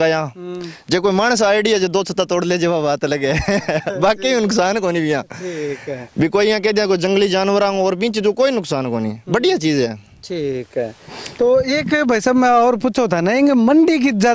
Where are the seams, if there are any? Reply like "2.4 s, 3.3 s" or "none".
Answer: none